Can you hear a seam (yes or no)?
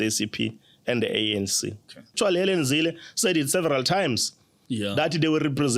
yes